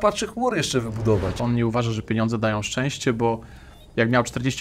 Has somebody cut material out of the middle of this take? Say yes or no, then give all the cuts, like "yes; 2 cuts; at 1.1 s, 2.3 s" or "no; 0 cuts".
yes; 1 cut; at 1.4 s